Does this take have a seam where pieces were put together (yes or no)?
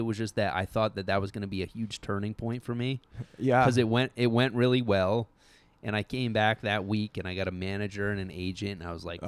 no